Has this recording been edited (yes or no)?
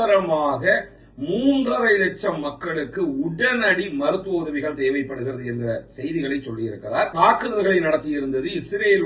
yes